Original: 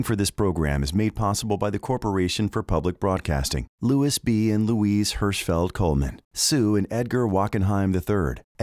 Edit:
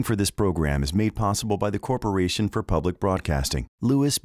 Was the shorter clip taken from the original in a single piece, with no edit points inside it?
yes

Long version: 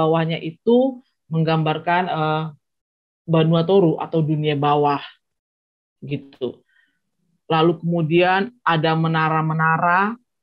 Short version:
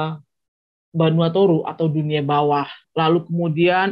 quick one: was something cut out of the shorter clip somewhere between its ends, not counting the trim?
yes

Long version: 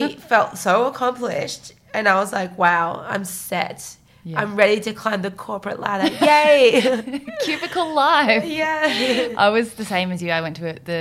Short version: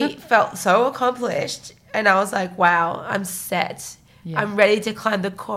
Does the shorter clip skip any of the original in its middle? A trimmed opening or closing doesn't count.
no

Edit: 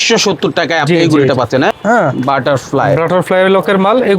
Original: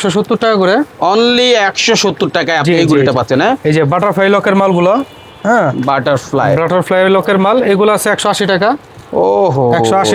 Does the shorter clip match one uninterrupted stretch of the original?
no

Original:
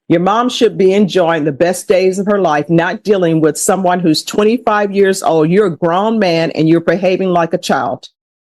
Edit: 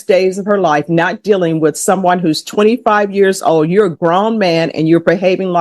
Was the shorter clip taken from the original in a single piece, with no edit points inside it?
yes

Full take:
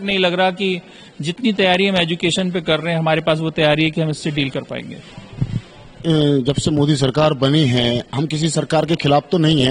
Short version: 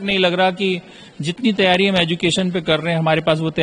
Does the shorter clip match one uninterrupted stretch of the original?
yes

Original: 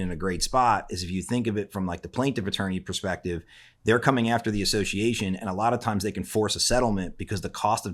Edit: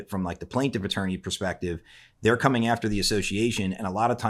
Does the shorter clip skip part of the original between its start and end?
no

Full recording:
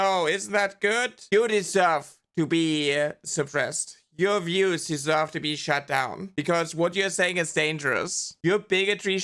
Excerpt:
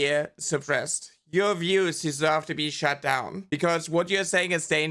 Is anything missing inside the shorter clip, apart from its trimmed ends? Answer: no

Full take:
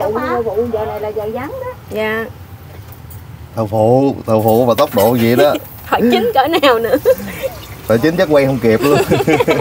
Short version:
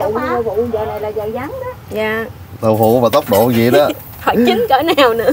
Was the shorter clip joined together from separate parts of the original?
yes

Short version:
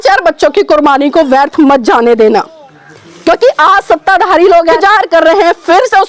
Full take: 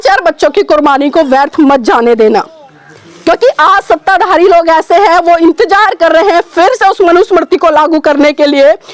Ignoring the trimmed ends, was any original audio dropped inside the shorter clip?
yes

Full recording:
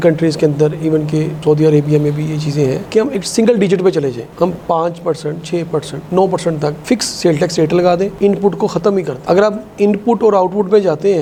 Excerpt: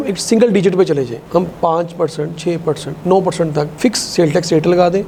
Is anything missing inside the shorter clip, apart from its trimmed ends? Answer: no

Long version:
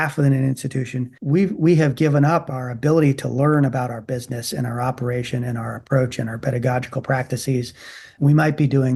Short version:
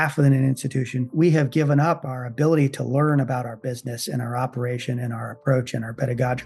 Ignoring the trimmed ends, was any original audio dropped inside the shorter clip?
yes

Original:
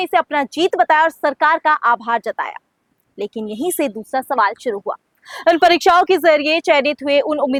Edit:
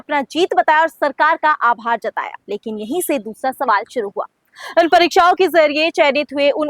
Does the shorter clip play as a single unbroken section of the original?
no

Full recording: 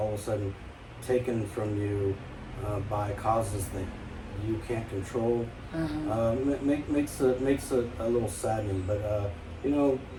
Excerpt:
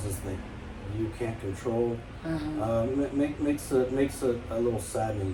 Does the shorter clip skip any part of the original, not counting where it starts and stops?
no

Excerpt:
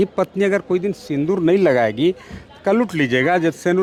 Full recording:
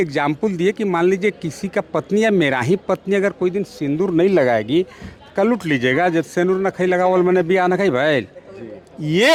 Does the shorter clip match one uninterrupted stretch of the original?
yes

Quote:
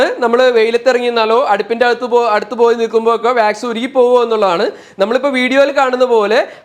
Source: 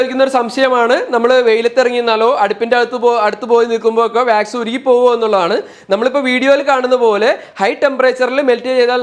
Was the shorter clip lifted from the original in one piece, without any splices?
yes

